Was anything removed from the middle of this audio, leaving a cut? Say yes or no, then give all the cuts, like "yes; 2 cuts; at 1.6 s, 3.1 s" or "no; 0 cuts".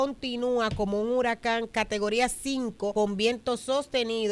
yes; 2 cuts; at 1.7 s, 2.9 s